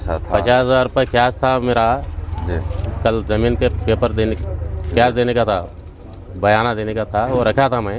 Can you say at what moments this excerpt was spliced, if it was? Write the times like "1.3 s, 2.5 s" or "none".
none